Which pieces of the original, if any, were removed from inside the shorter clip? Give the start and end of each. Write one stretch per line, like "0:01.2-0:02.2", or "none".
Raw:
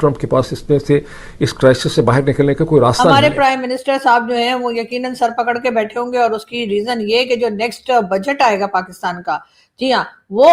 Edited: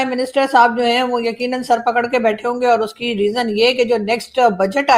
none